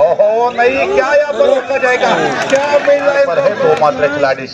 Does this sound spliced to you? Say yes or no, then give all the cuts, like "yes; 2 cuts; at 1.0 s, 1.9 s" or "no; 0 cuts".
yes; 1 cut; at 3.4 s